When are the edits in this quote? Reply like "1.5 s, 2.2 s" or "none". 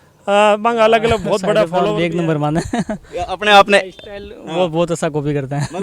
1.7 s